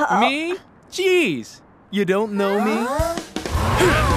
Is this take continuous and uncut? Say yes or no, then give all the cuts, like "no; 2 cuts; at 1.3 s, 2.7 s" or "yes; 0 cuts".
yes; 0 cuts